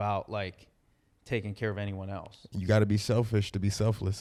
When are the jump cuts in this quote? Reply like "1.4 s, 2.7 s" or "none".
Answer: none